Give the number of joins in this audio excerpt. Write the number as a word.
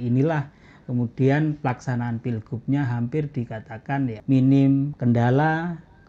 two